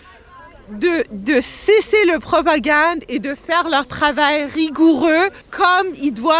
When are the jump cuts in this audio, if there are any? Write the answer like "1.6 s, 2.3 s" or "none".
5.4 s